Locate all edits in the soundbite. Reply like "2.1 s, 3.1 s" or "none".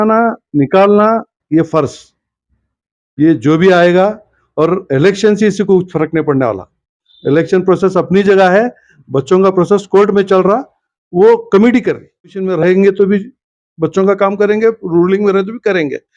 12.4 s

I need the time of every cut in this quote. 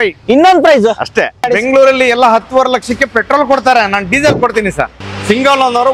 1.5 s, 5.0 s

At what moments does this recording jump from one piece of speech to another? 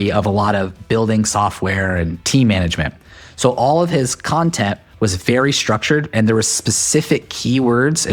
none

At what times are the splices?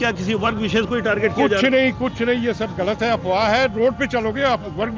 none

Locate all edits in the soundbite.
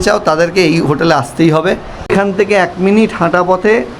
1.9 s

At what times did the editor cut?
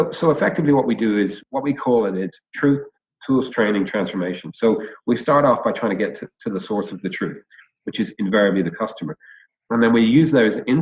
1.4 s

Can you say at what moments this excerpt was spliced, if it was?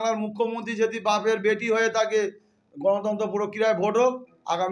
none

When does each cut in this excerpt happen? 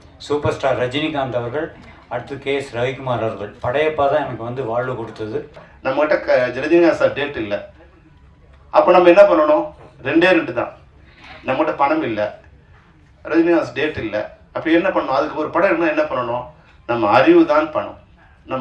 5.7 s

